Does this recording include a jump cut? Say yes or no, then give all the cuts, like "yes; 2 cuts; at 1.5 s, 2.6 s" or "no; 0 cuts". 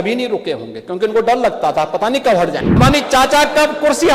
yes; 1 cut; at 2.8 s